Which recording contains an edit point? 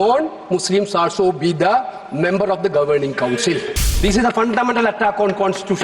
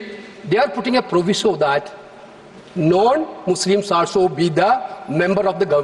first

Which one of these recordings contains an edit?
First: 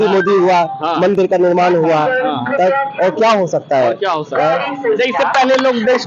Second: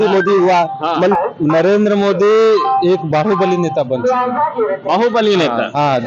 second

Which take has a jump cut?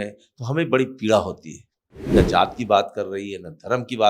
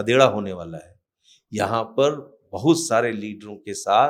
first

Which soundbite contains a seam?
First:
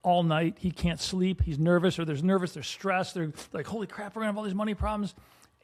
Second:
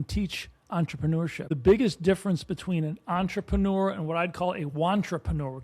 second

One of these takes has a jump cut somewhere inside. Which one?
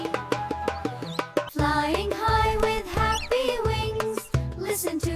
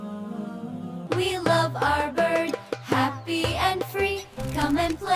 second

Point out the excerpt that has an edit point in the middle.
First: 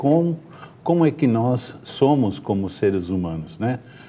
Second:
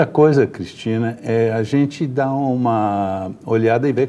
second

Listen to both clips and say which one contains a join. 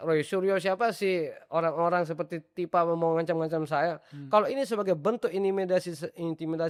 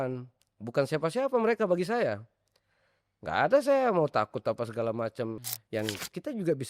second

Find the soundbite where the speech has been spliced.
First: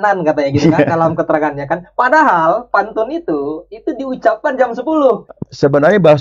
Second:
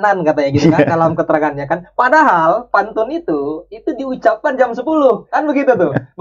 first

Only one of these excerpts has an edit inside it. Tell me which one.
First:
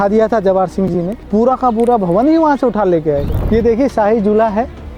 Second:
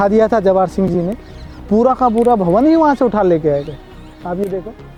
first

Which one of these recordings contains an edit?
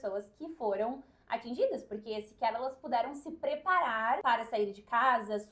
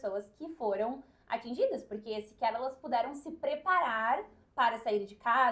first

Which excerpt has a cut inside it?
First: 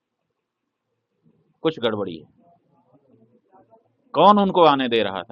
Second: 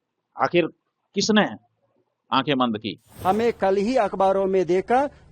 second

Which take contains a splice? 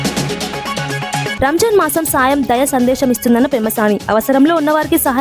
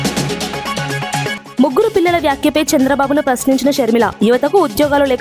second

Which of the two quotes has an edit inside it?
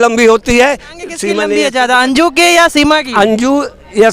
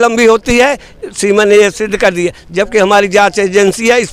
first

